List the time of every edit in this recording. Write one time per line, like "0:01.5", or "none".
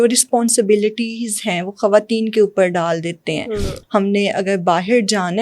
0:03.7